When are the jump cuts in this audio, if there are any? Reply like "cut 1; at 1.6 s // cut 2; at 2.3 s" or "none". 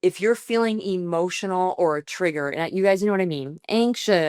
none